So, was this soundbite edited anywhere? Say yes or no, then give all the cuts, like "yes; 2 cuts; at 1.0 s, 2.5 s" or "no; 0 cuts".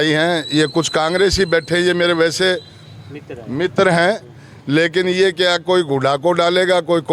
no; 0 cuts